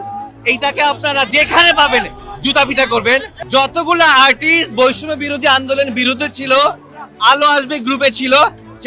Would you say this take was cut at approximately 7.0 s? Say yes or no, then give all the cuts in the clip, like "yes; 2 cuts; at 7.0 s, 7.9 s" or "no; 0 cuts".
no; 2 cuts; at 1.3 s, 3.3 s